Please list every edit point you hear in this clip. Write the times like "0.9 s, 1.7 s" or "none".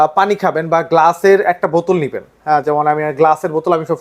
none